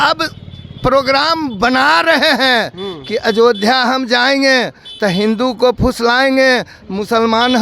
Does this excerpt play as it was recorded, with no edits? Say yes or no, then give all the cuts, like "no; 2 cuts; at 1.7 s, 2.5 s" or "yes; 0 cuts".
yes; 0 cuts